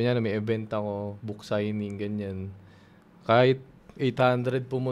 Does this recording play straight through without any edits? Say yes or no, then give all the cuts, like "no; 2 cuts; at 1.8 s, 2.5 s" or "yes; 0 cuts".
yes; 0 cuts